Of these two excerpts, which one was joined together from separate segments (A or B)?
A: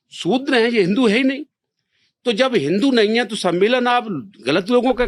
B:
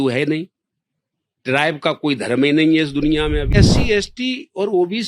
B